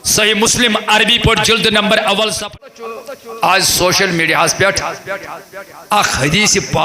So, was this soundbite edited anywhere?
yes; 1 cut; at 2.6 s

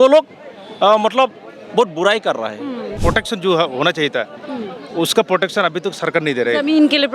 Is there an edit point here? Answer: yes; 1 cut; at 2.9 s

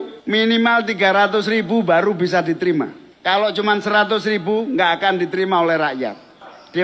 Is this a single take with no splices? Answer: yes; 0 cuts

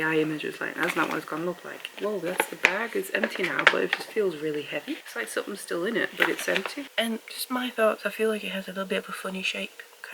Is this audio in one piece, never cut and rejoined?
no; 2 cuts; at 1.8 s, 6.8 s

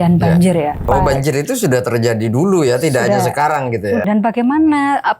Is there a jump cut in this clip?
yes; 2 cuts; at 0.8 s, 4.0 s

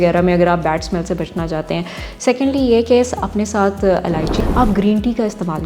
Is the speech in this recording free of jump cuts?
no; 1 cut; at 4.3 s

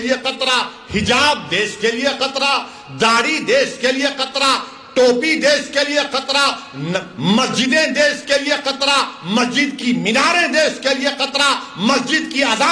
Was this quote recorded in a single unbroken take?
yes; 0 cuts

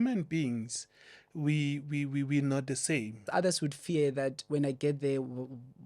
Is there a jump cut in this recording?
yes; 1 cut; at 3.3 s

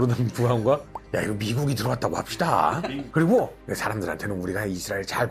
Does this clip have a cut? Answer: yes; 1 cut; at 3.0 s

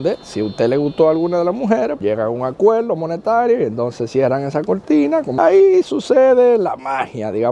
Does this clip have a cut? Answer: yes; 2 cuts; at 2.0 s, 5.4 s

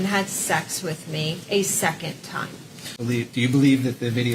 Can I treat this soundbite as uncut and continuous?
no; 1 cut; at 2.9 s

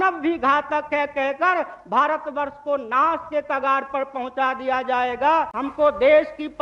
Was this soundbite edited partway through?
yes; 1 cut; at 5.6 s

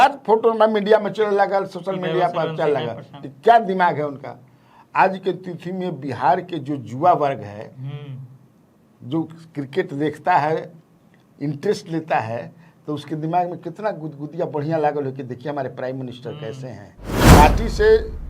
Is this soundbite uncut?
no; 1 cut; at 17.2 s

